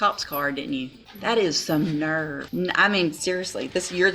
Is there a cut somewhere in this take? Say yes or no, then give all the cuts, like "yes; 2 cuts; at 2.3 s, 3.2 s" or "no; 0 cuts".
yes; 2 cuts; at 1.0 s, 2.4 s